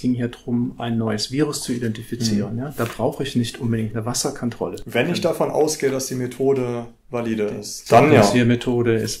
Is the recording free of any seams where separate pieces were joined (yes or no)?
yes